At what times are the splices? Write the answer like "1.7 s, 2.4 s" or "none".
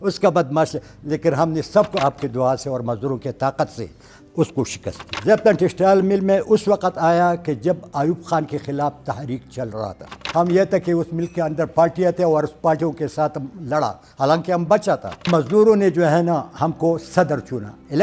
1.9 s, 5.1 s, 10.2 s, 15.3 s